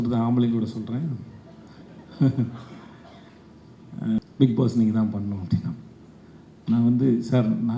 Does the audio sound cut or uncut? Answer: cut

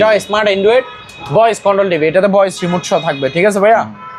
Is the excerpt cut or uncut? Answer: uncut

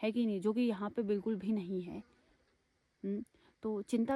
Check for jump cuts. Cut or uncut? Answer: uncut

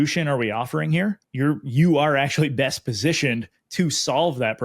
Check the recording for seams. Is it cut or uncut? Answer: cut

